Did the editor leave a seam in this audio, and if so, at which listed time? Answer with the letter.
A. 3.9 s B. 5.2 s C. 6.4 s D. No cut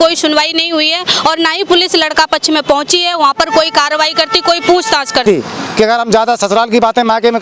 B